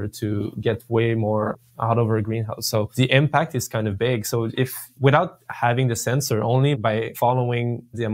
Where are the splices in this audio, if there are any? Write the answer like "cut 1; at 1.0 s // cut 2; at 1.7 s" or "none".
cut 1; at 2.9 s // cut 2; at 6.8 s